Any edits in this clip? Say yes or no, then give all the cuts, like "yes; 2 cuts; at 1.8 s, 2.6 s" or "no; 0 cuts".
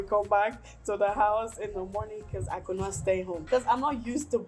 yes; 1 cut; at 3.4 s